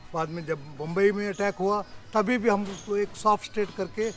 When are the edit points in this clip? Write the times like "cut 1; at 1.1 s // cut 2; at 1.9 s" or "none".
none